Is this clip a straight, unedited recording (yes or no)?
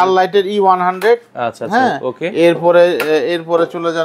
yes